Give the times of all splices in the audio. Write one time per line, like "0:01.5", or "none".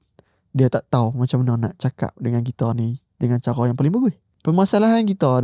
0:04.3